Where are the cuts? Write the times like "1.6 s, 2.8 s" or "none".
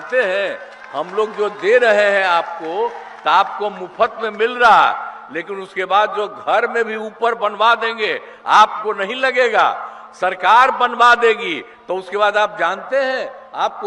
none

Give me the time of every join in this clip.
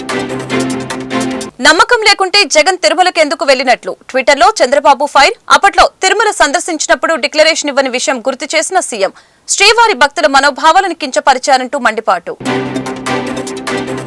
1.4 s

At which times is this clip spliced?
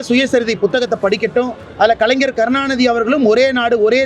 1.6 s

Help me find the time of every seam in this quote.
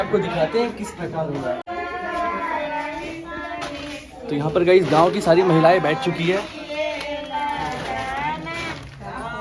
none

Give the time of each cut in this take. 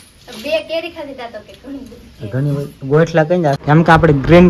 3.6 s

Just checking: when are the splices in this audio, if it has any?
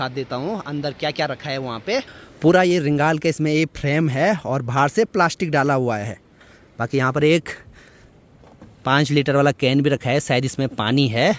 none

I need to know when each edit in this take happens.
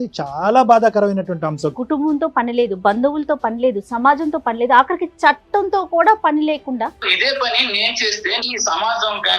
1.7 s, 7.0 s, 8.5 s

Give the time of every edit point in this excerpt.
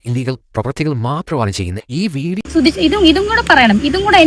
2.4 s

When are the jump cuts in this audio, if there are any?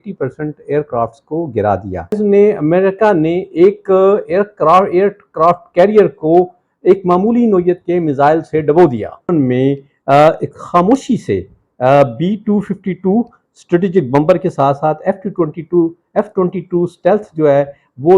2.2 s, 9.3 s

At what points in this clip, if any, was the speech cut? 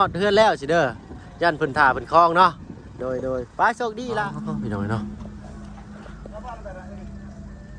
4.3 s

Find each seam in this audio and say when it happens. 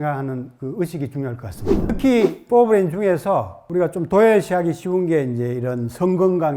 1.8 s

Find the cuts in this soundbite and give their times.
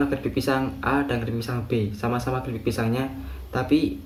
none

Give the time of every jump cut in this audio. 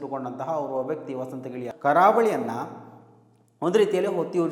1.7 s

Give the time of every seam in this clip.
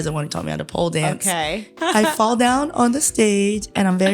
1.8 s

